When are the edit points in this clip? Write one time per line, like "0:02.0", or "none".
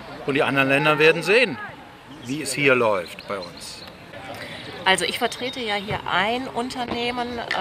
0:04.4